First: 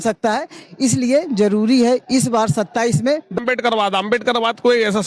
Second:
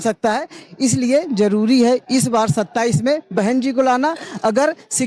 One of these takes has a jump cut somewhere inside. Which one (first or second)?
first